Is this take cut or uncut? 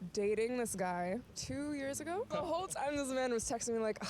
cut